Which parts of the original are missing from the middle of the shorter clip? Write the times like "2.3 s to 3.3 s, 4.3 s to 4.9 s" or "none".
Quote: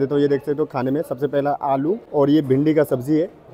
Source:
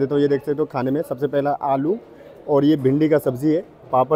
2.0 s to 2.4 s